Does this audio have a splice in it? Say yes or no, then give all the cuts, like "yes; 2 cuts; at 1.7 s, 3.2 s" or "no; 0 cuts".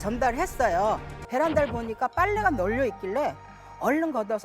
yes; 1 cut; at 1.1 s